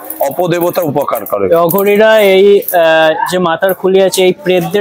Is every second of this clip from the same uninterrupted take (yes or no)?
yes